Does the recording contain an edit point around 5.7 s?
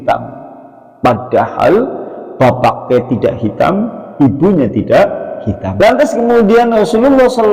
yes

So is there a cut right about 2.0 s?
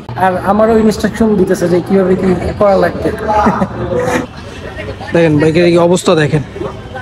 no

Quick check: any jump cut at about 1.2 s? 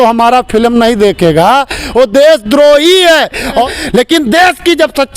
no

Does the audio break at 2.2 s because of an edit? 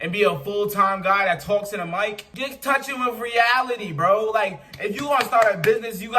yes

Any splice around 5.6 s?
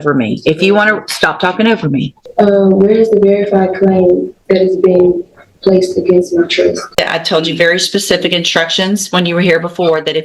no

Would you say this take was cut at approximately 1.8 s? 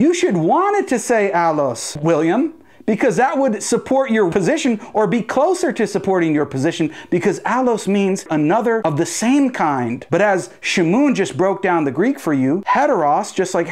no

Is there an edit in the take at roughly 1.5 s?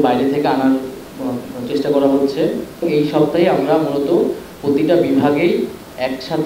no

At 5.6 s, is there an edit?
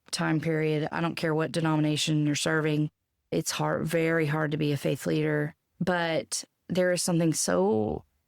yes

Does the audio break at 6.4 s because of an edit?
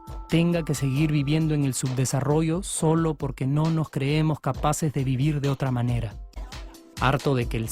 yes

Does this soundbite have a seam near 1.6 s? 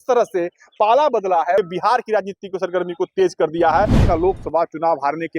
yes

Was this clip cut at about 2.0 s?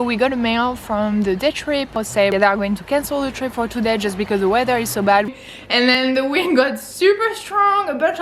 yes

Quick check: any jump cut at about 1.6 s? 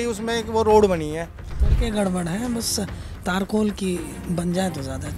yes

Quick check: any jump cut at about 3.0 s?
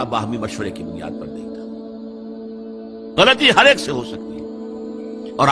yes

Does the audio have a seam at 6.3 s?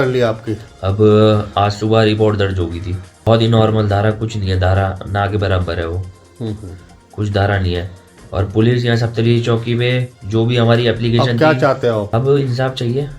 no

